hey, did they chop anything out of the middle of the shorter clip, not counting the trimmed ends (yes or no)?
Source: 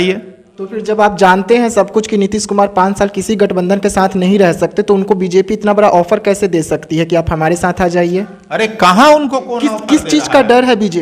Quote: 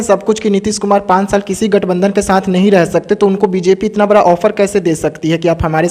no